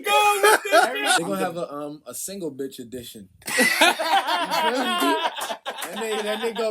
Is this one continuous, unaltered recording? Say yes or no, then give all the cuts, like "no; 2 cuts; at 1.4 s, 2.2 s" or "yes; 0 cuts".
no; 1 cut; at 1.2 s